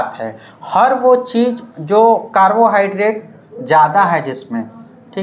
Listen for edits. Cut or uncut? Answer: uncut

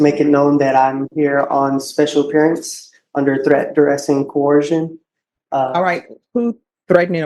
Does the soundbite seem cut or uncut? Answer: uncut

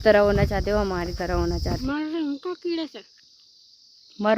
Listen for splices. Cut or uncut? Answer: cut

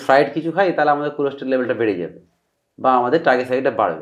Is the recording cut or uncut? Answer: uncut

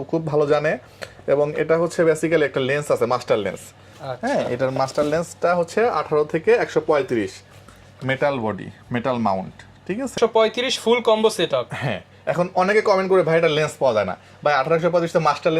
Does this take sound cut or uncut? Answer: cut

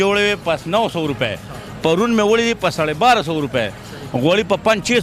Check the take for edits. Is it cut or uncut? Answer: uncut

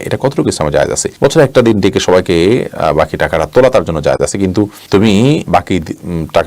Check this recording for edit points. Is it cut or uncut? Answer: uncut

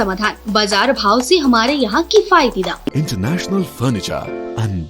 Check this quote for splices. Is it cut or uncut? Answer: cut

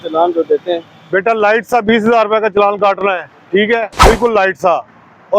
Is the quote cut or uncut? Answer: cut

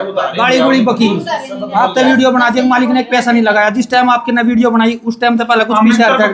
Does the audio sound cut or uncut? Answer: uncut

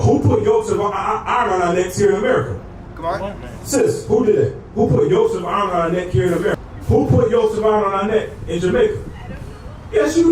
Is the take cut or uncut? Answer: cut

